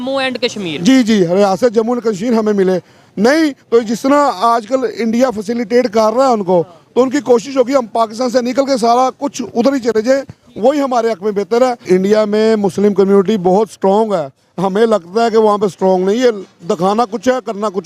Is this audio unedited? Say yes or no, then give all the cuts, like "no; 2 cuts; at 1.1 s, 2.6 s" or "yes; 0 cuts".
no; 1 cut; at 11.9 s